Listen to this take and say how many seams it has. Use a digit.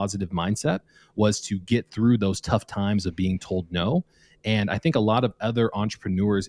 0